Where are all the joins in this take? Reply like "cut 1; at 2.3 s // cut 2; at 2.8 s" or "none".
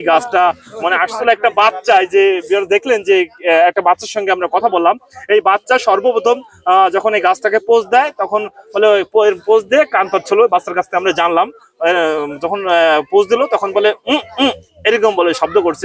none